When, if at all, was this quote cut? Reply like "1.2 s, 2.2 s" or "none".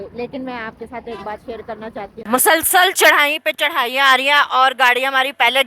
2.2 s